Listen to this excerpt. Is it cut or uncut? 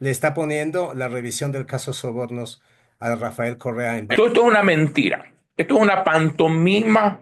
cut